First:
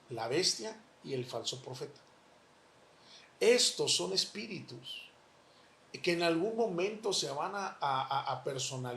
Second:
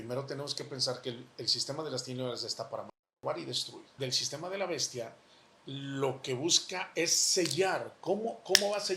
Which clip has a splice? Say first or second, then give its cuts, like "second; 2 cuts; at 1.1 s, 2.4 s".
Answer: second; 1 cut; at 3.9 s